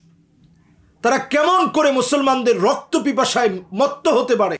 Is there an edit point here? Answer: no; 0 cuts

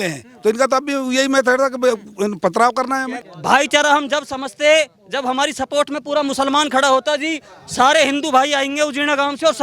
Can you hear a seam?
yes; 1 cut; at 3.3 s

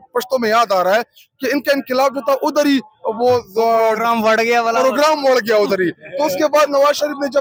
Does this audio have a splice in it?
no; 0 cuts

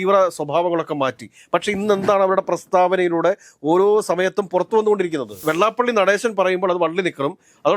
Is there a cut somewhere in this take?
yes; 1 cut; at 5.4 s

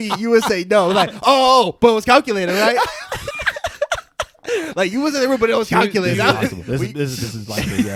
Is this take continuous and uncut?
yes; 0 cuts

